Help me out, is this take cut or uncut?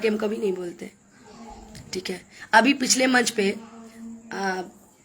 uncut